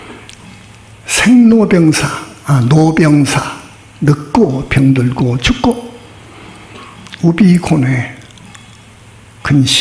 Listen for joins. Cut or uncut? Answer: uncut